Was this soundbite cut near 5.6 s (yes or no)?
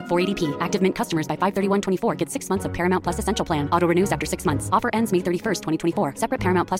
no